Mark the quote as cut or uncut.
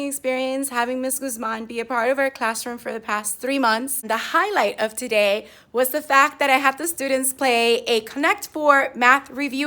cut